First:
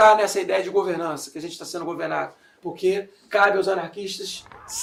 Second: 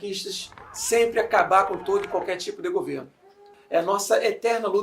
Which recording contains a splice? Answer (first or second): second